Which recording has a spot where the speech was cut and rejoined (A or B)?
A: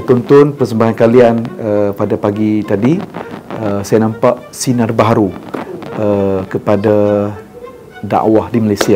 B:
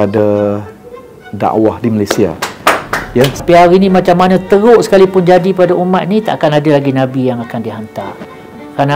B